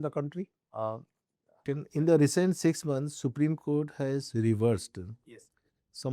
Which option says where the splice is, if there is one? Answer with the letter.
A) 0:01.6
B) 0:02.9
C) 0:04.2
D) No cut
A